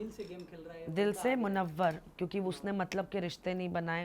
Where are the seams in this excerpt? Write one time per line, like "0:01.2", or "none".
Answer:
none